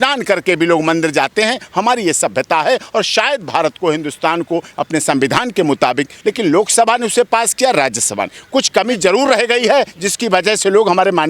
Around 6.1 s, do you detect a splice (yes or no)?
yes